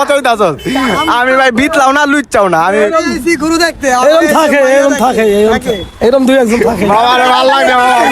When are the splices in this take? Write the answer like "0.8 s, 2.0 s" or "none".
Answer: none